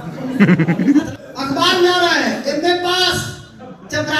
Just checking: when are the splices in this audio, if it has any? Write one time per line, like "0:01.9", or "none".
0:01.1